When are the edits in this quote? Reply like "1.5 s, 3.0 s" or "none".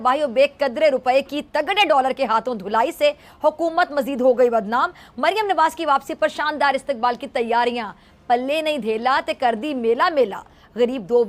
none

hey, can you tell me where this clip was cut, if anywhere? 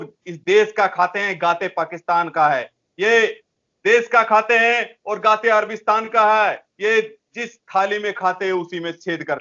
none

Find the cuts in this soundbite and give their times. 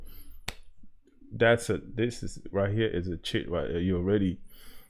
none

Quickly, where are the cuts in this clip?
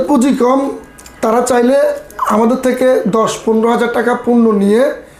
none

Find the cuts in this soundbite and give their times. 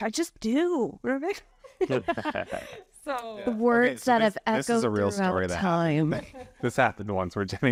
none

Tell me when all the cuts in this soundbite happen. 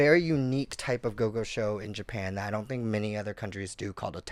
none

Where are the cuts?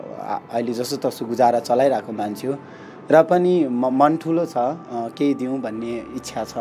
none

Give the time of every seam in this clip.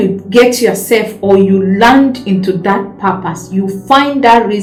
none

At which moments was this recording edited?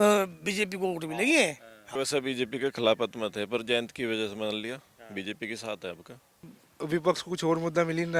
1.8 s, 6.6 s

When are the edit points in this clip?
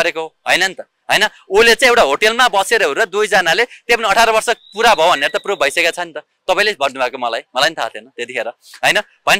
none

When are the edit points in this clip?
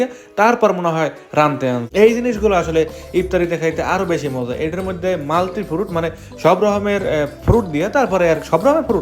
1.8 s

